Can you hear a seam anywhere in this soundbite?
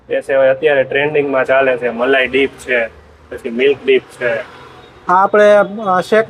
no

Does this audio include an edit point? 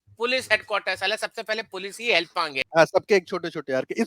yes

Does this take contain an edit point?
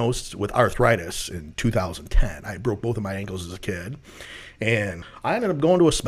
yes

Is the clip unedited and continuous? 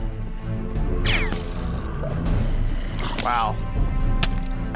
no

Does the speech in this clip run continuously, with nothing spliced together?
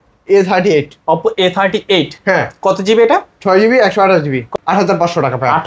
no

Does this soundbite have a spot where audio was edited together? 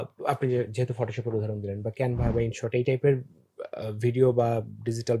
no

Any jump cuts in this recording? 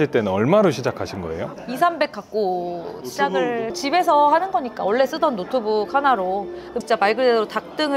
yes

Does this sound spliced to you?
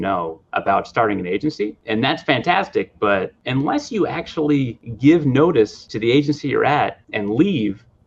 yes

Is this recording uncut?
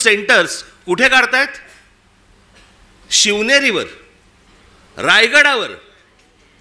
yes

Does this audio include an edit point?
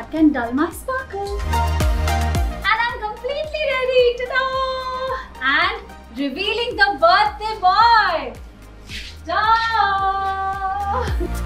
no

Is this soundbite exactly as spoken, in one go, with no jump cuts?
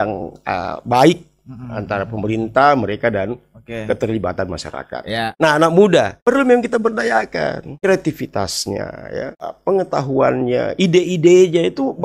no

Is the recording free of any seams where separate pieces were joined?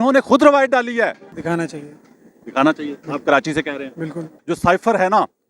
no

